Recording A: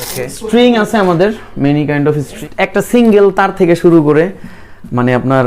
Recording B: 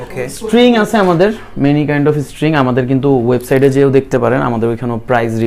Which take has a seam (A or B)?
A